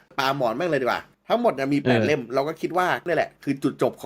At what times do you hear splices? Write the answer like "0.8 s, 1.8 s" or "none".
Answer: 1.1 s, 3.0 s